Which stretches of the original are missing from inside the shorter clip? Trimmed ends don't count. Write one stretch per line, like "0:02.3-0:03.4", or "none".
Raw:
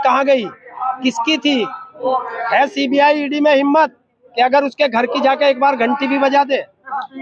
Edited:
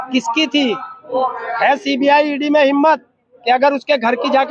none